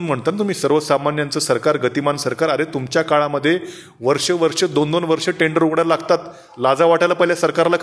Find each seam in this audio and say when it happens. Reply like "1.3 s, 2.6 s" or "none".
none